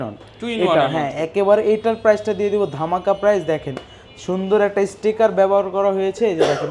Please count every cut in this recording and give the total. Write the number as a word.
zero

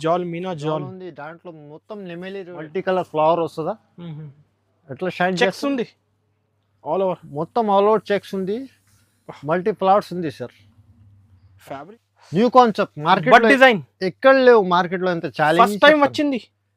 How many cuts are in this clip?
two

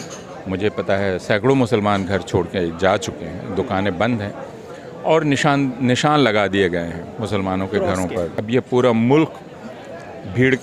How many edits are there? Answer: one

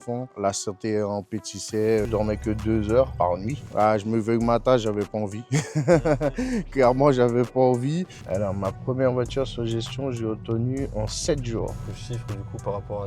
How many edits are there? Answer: four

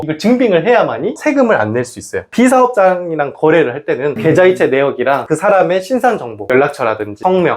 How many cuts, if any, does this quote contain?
one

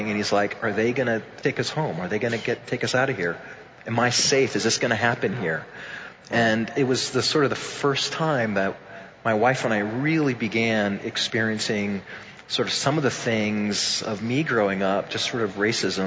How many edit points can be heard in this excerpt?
one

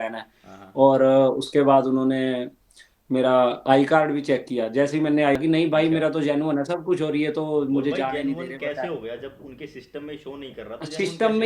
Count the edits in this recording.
one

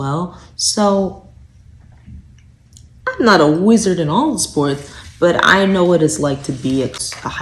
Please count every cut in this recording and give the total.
zero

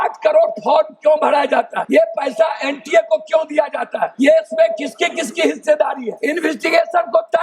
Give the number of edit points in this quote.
three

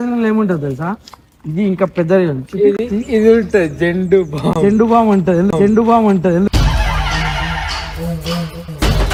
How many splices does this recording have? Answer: zero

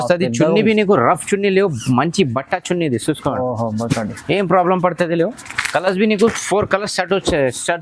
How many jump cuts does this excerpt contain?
zero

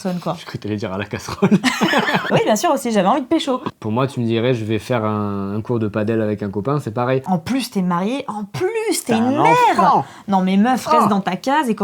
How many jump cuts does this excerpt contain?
three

